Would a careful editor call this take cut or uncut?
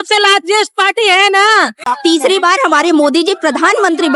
cut